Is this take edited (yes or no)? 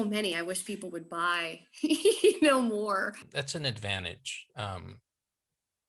yes